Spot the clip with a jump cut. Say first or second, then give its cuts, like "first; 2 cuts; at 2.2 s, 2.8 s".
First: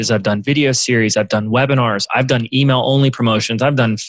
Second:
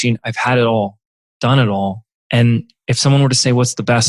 second; 1 cut; at 2.1 s